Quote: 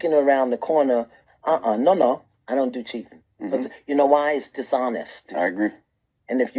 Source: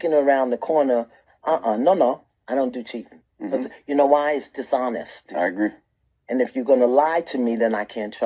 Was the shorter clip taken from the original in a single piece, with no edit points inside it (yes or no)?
yes